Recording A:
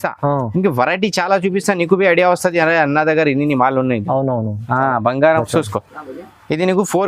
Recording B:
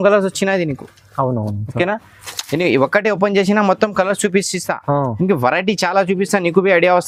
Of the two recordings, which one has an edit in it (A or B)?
A